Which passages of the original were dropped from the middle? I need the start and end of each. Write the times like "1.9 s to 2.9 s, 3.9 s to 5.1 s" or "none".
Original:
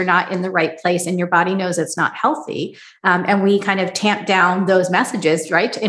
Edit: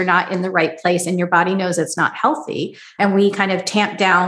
2.9 s to 3.2 s